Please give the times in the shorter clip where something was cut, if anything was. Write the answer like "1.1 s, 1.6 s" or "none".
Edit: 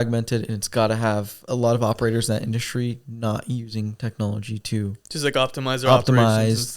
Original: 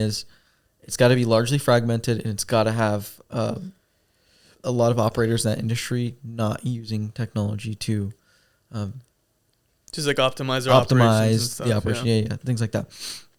1.4 s, 5.0 s